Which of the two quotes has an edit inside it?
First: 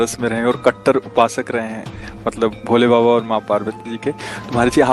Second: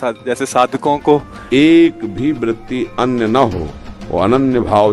second; 1 cut; at 1.3 s

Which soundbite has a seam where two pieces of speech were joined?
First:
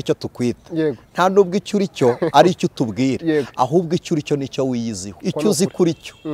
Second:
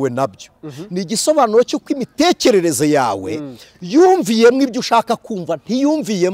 first; 1 cut; at 5.1 s

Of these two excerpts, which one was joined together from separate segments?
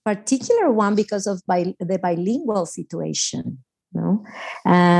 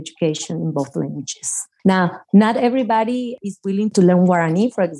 second; 2 cuts; at 2.0 s, 3.4 s

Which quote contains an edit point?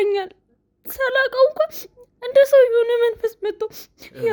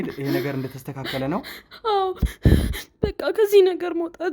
second; 1 cut; at 2.2 s

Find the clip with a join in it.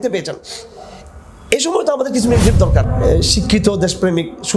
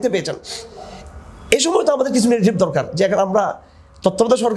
first; 1 cut; at 2.9 s

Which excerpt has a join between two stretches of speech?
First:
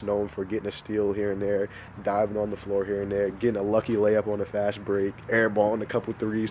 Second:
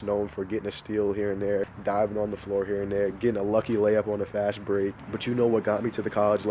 second; 2 cuts; at 1.7 s, 5.0 s

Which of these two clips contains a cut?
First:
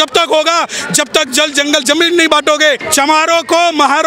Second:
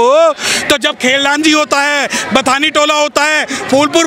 first; 1 cut; at 2.8 s

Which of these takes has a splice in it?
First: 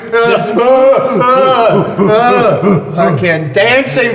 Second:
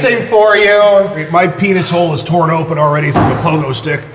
second; 1 cut; at 1.2 s

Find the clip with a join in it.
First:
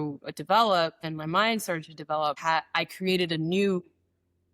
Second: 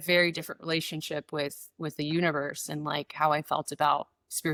first; 2 cuts; at 1.1 s, 2.4 s

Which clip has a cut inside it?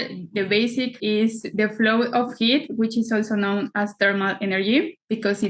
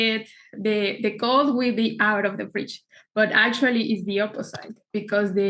first; 1 cut; at 1.0 s

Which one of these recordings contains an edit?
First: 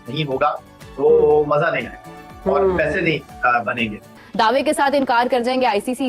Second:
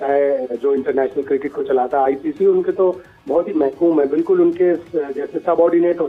first; 1 cut; at 4.2 s

